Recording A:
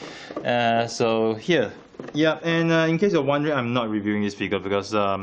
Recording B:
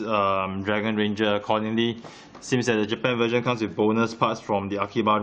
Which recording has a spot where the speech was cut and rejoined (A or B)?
A